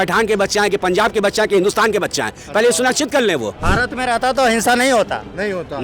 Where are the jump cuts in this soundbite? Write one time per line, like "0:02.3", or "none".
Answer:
0:03.7